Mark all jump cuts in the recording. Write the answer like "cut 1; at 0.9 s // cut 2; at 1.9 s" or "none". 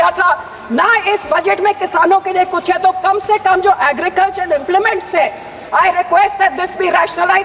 cut 1; at 5.6 s

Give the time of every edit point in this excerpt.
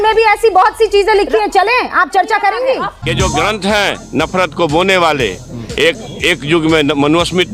cut 1; at 3.0 s

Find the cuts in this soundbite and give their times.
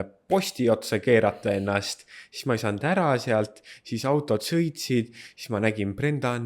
none

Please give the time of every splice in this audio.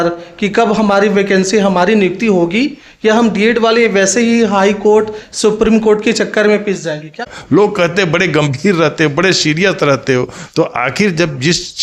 cut 1; at 7.3 s

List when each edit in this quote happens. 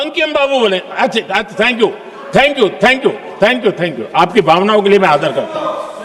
none

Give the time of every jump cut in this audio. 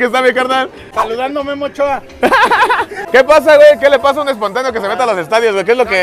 cut 1; at 3.0 s

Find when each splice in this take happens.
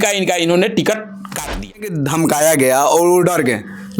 cut 1; at 1.9 s

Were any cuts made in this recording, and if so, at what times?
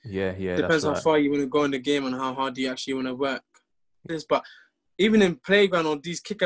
cut 1; at 4.1 s

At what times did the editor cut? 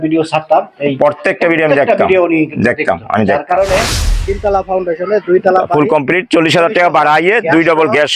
cut 1; at 4.1 s

